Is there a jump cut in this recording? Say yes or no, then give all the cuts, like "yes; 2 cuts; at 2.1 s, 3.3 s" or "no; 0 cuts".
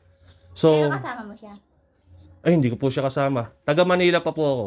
no; 0 cuts